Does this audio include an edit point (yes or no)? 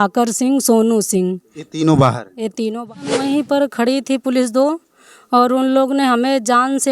yes